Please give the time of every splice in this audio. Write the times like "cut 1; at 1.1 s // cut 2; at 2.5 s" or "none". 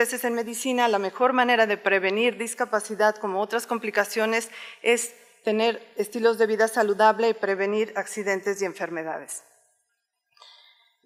none